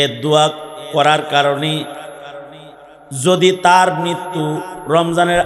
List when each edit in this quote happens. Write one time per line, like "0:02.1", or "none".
none